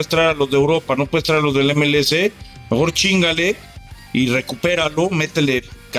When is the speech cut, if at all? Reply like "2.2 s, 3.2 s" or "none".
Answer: none